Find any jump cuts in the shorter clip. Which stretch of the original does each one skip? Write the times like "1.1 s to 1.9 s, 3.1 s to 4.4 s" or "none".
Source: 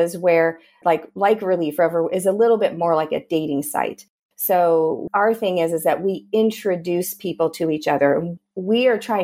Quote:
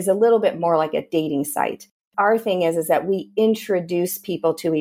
4.3 s to 5.0 s